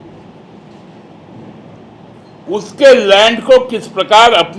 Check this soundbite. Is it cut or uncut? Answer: uncut